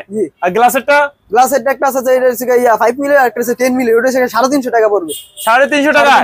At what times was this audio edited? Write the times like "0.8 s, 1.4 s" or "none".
none